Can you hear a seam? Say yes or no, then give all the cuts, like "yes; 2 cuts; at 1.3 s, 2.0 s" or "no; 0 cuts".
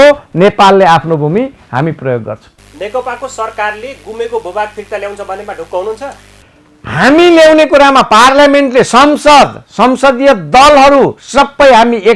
no; 0 cuts